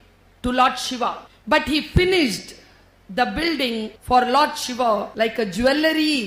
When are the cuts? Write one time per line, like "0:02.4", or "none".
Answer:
0:01.3
0:04.0
0:05.1